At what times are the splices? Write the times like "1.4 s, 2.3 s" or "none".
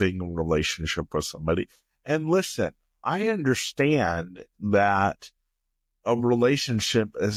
none